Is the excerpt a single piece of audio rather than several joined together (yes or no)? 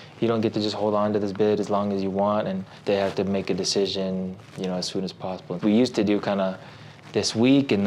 no